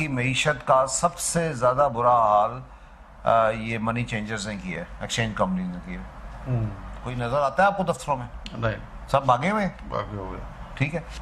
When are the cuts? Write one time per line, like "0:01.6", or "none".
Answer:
0:07.1